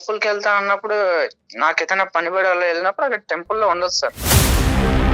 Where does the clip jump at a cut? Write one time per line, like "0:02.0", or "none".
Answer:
0:04.2